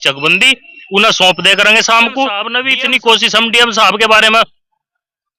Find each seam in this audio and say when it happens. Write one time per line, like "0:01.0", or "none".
0:02.6